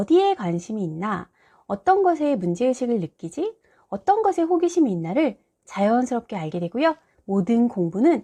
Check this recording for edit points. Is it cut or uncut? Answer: uncut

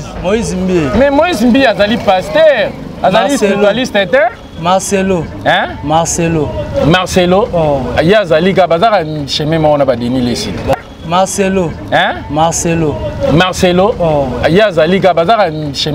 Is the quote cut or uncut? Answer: cut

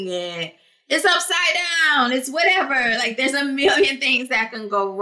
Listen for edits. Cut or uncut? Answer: uncut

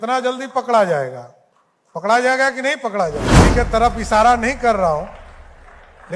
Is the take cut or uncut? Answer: cut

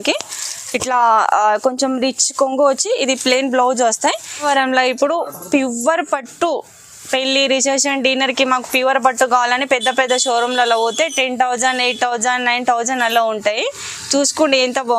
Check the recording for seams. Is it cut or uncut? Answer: cut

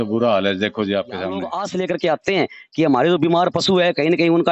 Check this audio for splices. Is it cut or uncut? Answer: cut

